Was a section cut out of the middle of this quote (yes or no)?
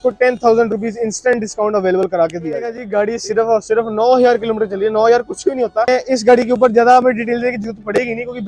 yes